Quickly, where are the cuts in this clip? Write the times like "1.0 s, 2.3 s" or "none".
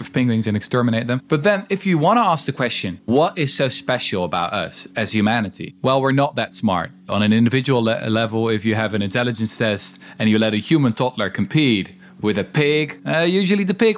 1.2 s, 3.1 s, 5.6 s, 7.0 s, 13.0 s